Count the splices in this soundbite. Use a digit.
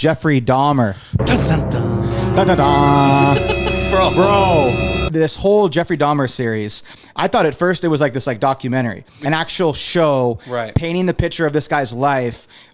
2